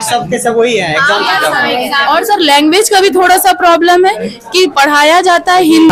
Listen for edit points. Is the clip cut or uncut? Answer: uncut